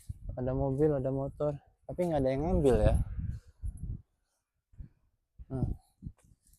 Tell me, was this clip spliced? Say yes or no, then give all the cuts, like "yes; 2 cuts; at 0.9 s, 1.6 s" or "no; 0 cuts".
no; 0 cuts